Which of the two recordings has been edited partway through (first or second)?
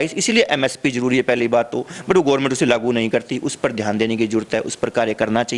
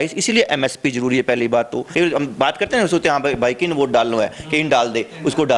second